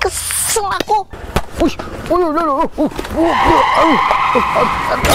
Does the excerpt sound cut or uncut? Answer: cut